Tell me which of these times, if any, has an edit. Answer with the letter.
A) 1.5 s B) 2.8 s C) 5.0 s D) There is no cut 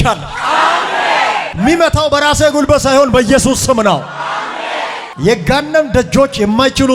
D